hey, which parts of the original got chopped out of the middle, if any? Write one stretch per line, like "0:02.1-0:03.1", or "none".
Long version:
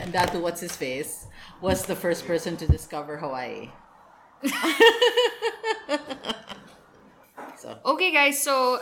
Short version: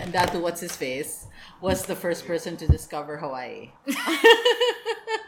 0:03.7-0:04.2